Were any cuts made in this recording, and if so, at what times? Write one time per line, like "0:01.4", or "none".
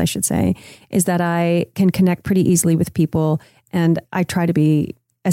0:04.0